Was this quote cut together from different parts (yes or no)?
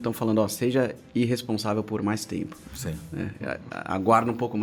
no